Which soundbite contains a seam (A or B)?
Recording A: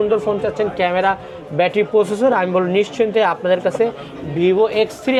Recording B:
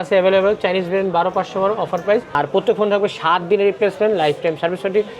B